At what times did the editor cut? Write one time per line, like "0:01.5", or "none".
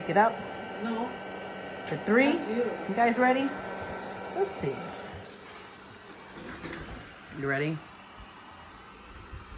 none